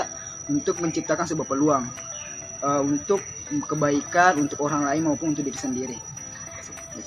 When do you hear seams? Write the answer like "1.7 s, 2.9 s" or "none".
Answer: none